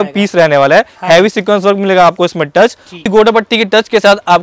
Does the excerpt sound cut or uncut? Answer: cut